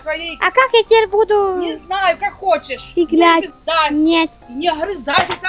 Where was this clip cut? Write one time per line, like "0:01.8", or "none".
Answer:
0:03.5